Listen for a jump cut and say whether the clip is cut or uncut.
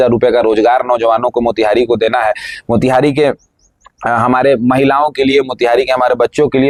uncut